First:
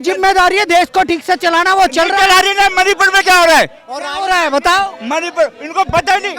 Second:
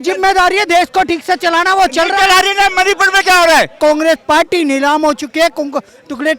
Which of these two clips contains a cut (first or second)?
second